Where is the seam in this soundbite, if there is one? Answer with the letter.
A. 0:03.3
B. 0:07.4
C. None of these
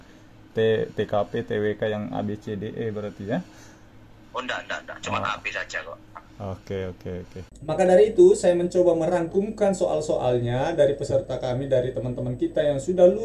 B